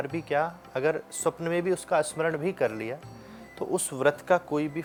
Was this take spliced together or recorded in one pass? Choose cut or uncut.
uncut